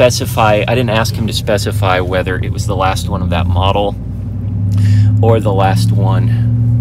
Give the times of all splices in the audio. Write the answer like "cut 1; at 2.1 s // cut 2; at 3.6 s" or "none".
none